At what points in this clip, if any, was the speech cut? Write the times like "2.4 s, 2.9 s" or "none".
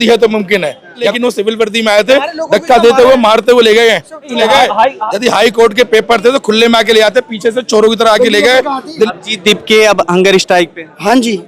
1.1 s, 4.3 s, 9.1 s

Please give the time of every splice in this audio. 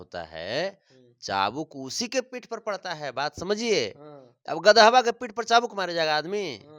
none

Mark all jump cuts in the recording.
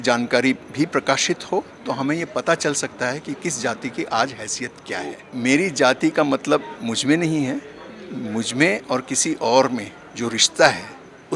5.3 s

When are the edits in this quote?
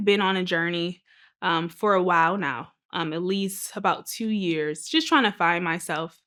none

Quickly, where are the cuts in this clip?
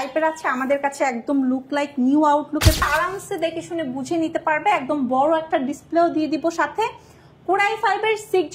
2.8 s

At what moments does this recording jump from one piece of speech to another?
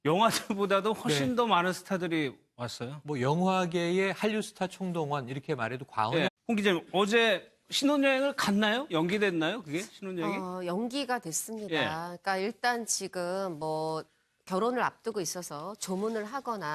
none

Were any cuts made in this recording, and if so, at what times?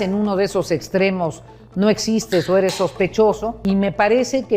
3.6 s

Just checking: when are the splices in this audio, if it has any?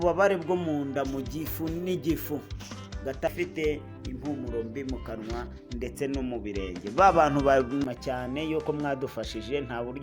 3.3 s, 7.8 s

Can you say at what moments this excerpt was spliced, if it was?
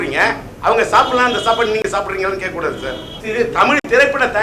3.1 s

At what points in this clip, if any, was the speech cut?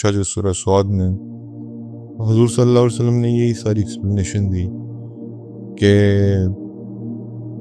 6.5 s

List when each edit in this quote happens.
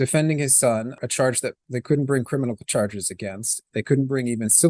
1.0 s

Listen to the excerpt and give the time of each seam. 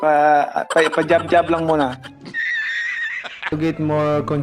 2.1 s, 3.5 s

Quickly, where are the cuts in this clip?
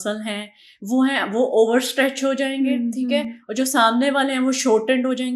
none

